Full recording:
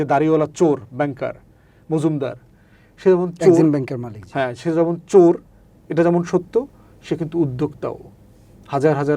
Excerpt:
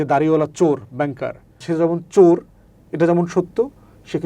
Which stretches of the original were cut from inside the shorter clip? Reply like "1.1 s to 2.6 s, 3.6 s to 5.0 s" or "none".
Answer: 1.6 s to 4.6 s